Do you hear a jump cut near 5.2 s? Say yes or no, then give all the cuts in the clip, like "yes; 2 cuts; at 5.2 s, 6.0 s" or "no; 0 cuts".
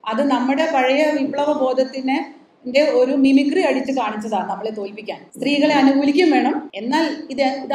yes; 2 cuts; at 5.2 s, 6.7 s